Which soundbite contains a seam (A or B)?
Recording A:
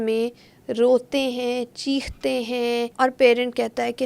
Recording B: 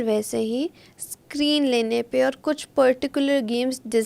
A